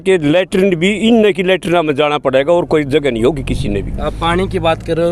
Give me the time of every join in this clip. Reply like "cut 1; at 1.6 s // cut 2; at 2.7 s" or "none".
none

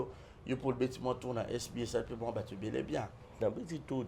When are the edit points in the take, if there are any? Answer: none

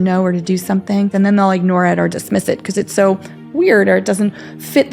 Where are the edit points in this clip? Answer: cut 1; at 1.1 s

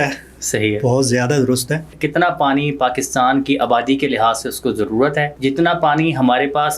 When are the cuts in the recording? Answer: cut 1; at 2.0 s // cut 2; at 5.3 s

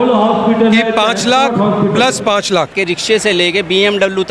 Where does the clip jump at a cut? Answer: cut 1; at 2.8 s

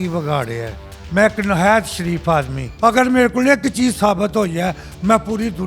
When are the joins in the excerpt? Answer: cut 1; at 2.6 s

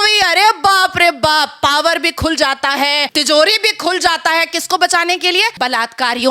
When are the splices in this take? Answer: cut 1; at 3.1 s // cut 2; at 5.5 s

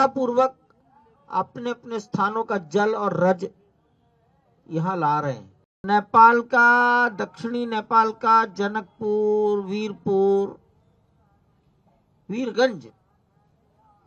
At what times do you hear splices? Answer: cut 1; at 5.8 s

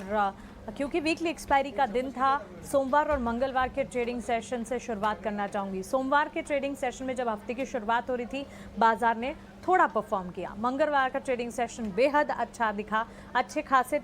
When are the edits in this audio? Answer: cut 1; at 7.1 s

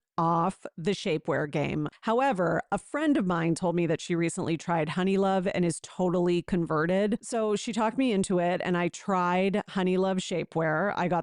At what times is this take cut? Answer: cut 1; at 1.9 s // cut 2; at 7.3 s

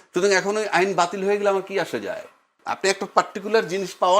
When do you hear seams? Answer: cut 1; at 2.6 s

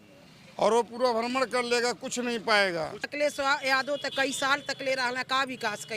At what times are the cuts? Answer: cut 1; at 3.1 s

